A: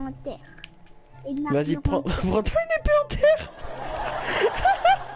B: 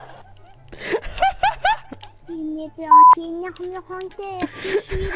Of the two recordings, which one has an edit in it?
B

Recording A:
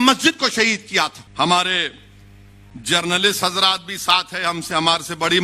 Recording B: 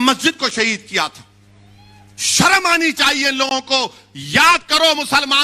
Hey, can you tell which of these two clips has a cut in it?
A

